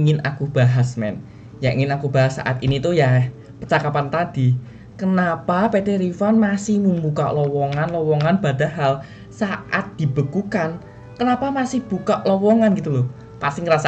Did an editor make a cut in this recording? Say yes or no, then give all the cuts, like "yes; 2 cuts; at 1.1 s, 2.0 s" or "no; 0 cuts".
no; 0 cuts